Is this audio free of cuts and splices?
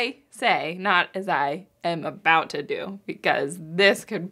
yes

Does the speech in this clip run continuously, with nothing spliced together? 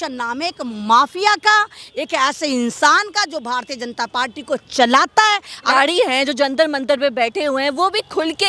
no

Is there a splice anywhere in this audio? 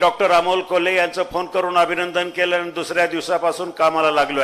no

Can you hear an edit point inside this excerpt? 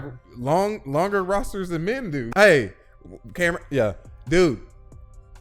yes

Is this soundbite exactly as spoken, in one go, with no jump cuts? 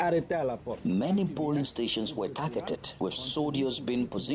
no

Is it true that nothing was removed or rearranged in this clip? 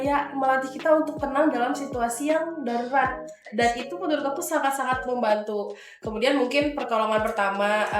yes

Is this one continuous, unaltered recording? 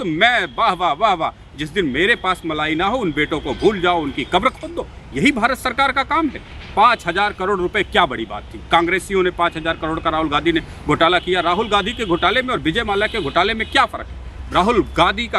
yes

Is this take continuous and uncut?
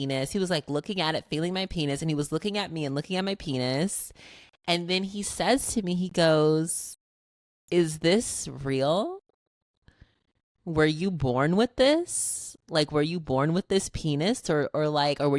yes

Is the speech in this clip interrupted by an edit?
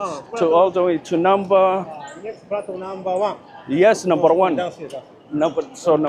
no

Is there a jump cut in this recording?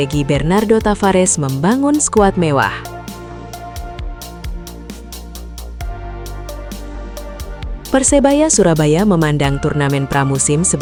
no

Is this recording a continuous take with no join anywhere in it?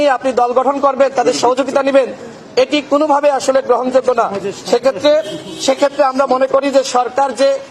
yes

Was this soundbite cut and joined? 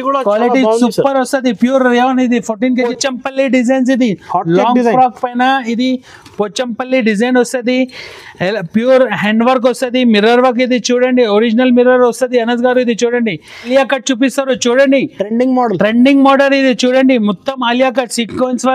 yes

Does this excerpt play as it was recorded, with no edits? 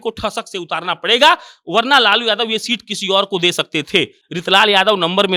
yes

